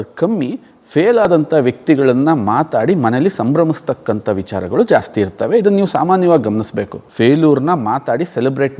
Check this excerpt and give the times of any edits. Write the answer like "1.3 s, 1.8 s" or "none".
7.0 s